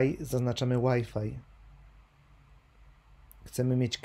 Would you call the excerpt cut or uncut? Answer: uncut